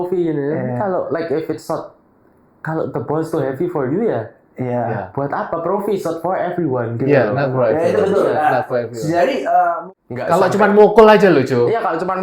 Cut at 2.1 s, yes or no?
no